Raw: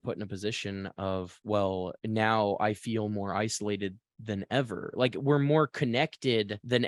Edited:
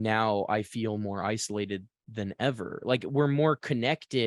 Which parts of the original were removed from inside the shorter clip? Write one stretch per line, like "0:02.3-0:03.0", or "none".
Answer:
none

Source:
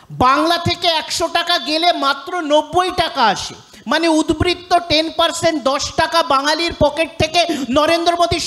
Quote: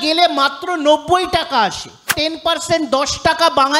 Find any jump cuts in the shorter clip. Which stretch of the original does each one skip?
0:03.8-0:04.9

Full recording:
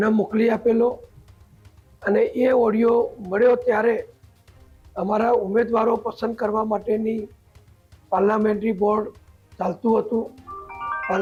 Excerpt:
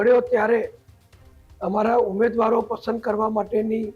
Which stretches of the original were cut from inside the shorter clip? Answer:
none

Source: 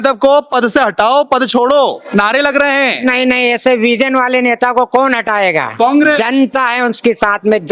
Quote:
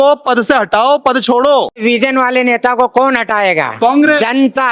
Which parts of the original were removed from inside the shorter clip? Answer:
0:02.1-0:03.8

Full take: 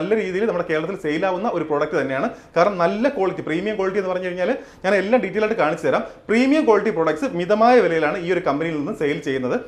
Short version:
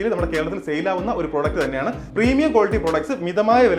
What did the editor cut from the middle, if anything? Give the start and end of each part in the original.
0:02.4-0:06.2

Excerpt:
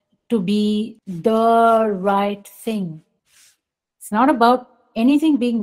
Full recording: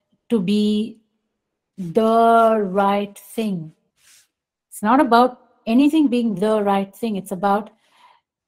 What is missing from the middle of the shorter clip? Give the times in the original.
0:01.0-0:01.7

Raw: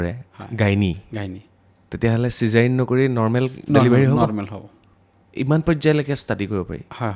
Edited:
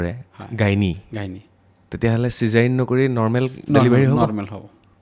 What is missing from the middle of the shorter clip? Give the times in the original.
none

